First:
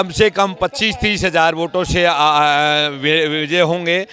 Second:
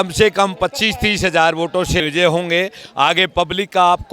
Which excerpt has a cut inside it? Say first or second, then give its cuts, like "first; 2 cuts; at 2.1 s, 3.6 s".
second; 1 cut; at 2.0 s